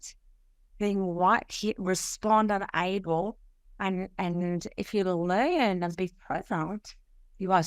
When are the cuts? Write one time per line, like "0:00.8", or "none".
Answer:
none